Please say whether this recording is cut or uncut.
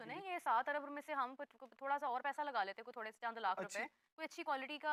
uncut